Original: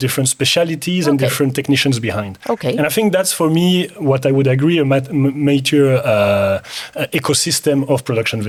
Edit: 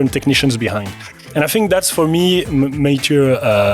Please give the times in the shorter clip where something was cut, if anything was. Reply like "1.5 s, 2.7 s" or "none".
2.5 s